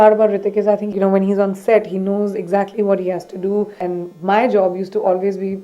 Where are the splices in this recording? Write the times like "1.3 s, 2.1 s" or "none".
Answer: 0.9 s, 3.9 s